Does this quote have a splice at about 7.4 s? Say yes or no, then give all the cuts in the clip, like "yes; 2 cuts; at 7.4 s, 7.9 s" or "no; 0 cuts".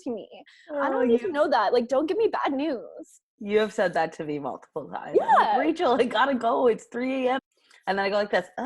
yes; 1 cut; at 7.4 s